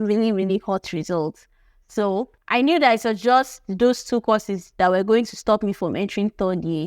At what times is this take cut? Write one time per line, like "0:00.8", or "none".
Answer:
0:02.4